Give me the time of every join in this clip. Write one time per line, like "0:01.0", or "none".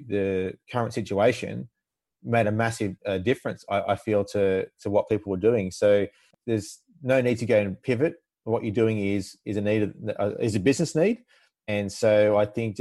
0:06.3